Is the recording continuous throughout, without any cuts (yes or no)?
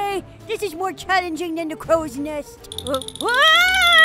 yes